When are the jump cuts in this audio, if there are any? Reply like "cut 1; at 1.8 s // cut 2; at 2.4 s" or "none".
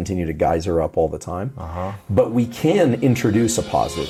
none

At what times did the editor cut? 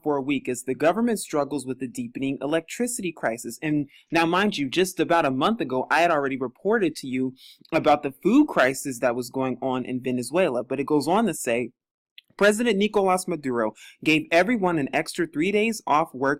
none

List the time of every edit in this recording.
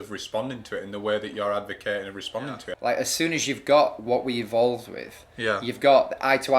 cut 1; at 2.7 s

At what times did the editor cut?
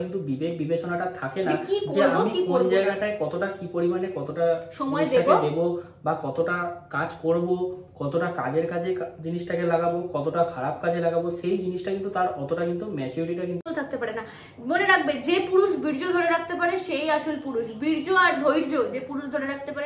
cut 1; at 13.7 s

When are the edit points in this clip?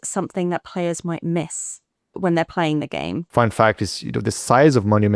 cut 1; at 3.2 s

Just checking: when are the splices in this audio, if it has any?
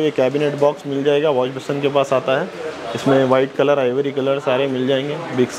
none

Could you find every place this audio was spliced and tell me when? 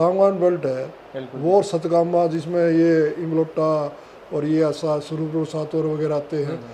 none

